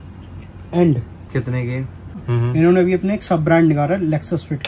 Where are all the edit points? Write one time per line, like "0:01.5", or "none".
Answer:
0:02.3